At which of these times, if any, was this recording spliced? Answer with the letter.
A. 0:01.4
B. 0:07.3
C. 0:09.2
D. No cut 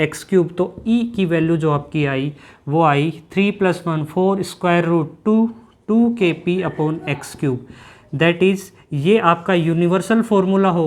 D